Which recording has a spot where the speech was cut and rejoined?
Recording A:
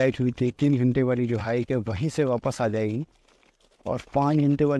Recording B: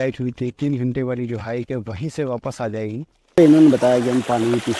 B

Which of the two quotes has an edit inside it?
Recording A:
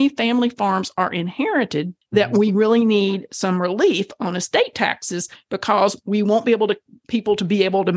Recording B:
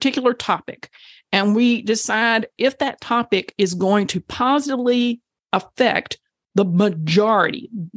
A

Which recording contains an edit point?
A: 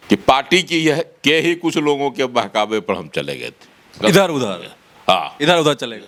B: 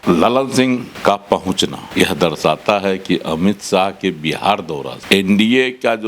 B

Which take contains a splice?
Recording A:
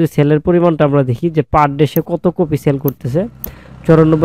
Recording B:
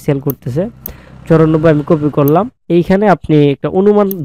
B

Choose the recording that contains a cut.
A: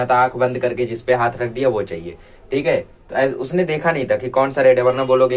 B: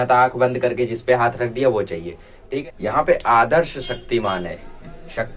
B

